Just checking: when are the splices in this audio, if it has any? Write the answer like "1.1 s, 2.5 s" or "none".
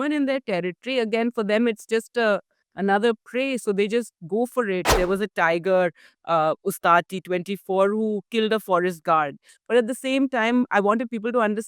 4.9 s, 9.5 s